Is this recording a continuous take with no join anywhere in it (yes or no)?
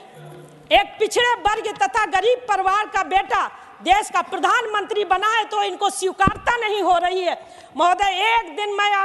yes